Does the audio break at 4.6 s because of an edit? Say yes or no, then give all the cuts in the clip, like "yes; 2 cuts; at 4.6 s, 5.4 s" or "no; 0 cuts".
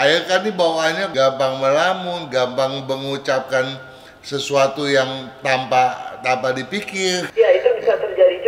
no; 2 cuts; at 1.1 s, 7.3 s